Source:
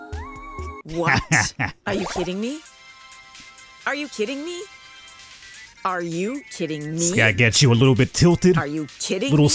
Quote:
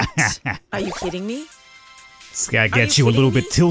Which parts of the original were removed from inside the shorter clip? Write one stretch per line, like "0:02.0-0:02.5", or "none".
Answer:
0:03.6-0:07.1